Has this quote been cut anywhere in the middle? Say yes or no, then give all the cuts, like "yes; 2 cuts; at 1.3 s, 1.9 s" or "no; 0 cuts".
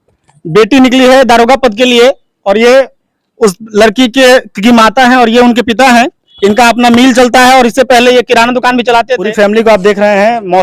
yes; 1 cut; at 9.3 s